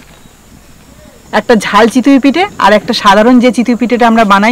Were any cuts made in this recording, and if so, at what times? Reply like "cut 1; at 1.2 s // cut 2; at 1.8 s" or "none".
cut 1; at 1.2 s

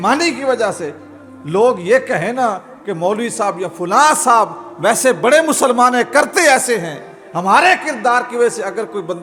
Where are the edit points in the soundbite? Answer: none

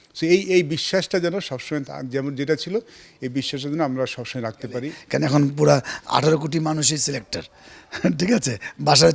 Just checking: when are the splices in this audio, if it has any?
cut 1; at 5.0 s

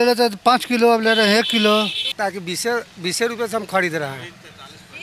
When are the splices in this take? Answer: cut 1; at 2.0 s

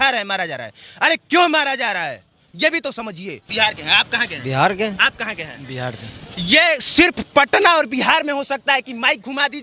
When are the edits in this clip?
cut 1; at 3.4 s

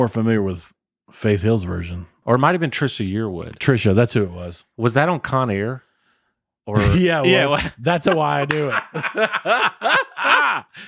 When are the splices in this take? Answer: cut 1; at 2.2 s

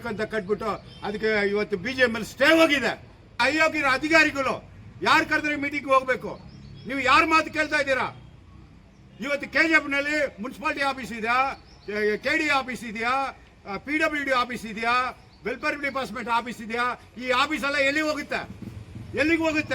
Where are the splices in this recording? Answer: cut 1; at 3.4 s

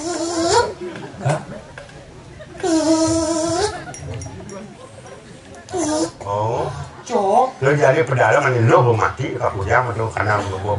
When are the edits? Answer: cut 1; at 6.2 s

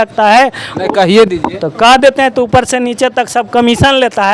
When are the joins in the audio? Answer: none

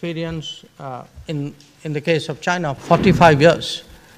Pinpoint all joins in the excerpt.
cut 1; at 2.8 s

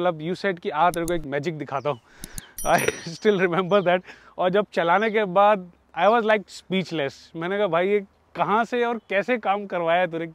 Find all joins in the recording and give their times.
none

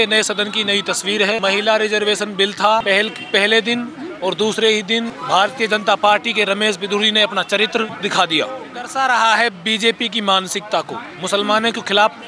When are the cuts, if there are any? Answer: cut 1; at 1.4 s // cut 2; at 2.8 s // cut 3; at 5.2 s // cut 4; at 7.9 s // cut 5; at 8.9 s

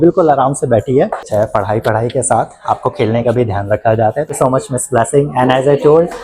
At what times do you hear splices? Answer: cut 1; at 1.3 s // cut 2; at 4.3 s

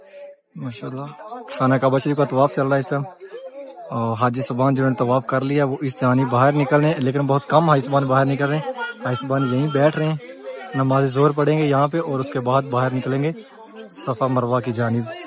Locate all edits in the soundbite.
none

